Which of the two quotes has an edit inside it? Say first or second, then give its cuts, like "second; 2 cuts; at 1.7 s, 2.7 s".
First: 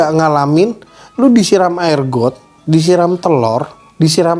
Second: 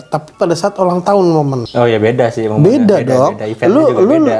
second; 1 cut; at 1.6 s